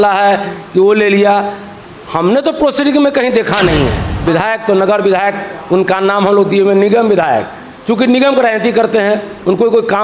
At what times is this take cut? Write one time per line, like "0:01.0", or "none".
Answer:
0:04.0